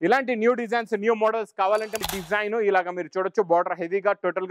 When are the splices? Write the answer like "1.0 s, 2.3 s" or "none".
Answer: 2.0 s